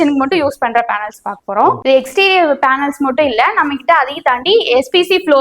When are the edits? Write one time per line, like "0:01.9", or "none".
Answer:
0:01.8